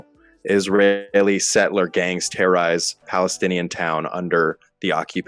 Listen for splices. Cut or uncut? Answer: uncut